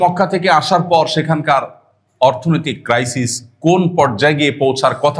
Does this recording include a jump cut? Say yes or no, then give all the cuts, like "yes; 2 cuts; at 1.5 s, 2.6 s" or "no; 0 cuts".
no; 0 cuts